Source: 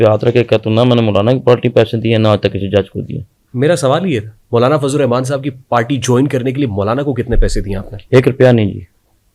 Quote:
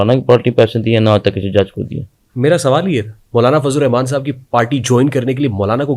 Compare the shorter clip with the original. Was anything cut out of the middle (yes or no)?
no